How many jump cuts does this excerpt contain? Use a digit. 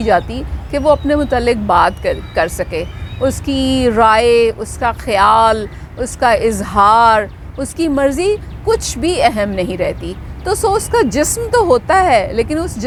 0